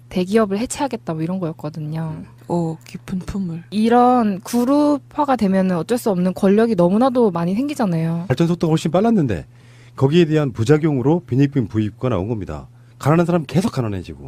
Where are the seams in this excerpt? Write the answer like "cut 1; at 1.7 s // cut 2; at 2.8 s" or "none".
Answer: none